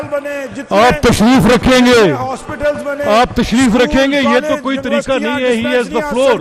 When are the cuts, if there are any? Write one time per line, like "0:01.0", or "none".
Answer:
none